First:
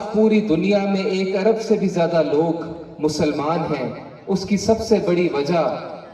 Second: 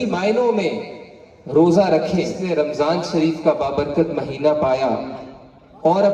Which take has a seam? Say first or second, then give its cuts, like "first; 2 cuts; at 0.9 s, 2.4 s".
second; 1 cut; at 2.3 s